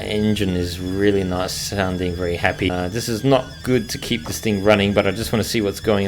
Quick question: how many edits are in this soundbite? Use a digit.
1